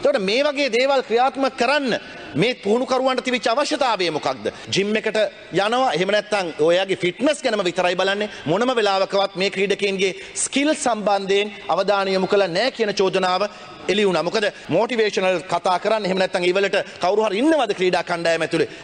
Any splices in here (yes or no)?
yes